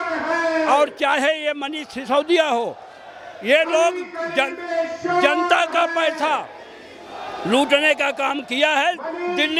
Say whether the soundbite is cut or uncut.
uncut